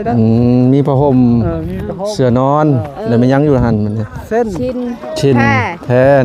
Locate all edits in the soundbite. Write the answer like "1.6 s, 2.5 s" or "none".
none